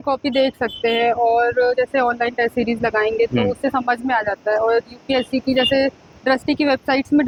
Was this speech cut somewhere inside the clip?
no; 0 cuts

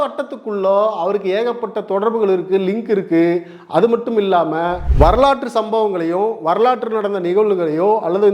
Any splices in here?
yes; 1 cut; at 4.8 s

